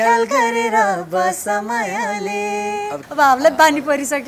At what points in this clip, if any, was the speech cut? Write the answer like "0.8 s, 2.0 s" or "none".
3.0 s